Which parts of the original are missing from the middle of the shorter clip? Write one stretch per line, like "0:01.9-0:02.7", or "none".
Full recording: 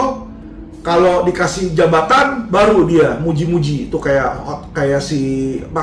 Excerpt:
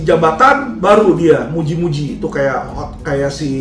none